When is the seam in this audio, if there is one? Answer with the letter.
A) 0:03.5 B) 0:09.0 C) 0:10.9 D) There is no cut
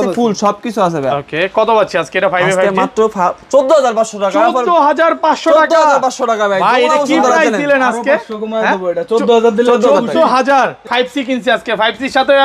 C